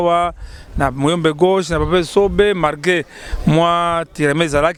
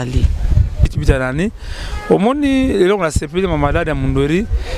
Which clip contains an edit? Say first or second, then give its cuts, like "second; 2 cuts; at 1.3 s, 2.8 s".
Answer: second; 1 cut; at 0.9 s